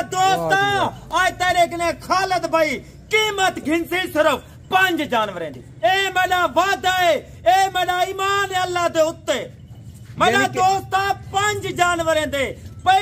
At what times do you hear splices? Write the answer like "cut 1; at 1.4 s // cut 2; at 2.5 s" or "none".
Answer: cut 1; at 5.6 s